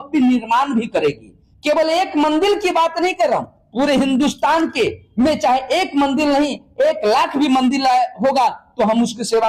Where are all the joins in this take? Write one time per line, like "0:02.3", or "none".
none